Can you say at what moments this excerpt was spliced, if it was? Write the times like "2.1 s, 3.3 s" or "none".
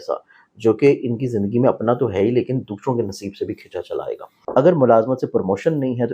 4.3 s